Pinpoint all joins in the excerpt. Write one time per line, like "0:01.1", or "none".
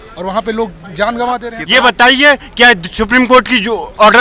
0:01.5